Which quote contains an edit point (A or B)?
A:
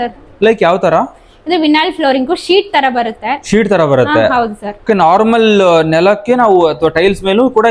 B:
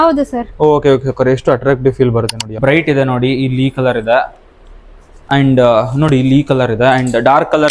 B